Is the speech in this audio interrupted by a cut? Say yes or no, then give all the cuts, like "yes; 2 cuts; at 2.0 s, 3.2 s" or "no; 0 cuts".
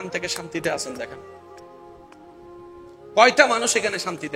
no; 0 cuts